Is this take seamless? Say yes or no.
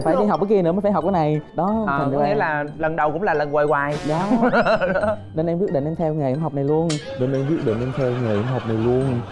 yes